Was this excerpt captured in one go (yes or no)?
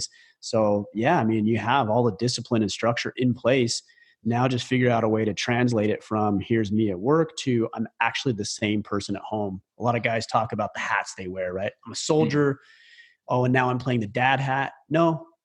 yes